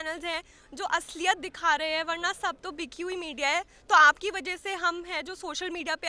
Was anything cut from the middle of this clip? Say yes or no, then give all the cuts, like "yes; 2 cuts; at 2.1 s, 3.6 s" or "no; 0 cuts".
no; 0 cuts